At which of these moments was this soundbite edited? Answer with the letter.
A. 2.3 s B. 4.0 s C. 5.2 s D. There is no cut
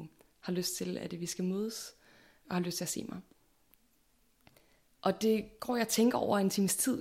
A